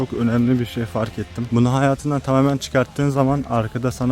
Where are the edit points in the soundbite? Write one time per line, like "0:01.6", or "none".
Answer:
0:01.5